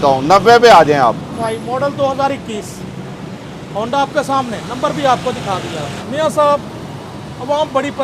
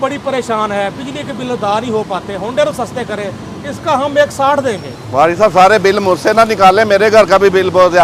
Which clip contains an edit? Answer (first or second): first